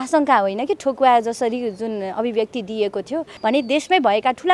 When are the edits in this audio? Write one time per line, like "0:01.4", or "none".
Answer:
0:03.3